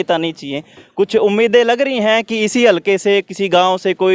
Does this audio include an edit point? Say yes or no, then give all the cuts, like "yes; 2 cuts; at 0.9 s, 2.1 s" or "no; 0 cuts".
no; 0 cuts